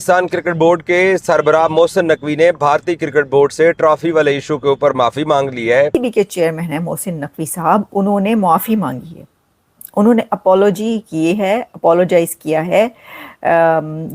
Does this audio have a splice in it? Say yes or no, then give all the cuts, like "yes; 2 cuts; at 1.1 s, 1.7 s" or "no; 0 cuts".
yes; 1 cut; at 6.0 s